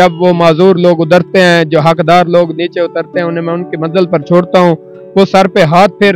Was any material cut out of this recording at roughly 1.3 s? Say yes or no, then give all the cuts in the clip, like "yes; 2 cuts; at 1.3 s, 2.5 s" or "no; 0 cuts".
no; 0 cuts